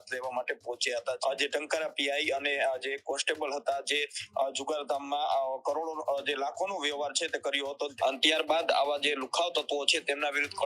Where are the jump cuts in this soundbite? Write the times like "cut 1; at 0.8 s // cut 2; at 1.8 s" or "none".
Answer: cut 1; at 1.2 s // cut 2; at 7.9 s